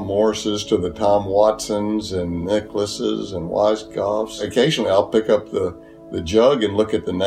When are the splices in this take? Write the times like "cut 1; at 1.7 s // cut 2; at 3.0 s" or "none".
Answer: cut 1; at 4.5 s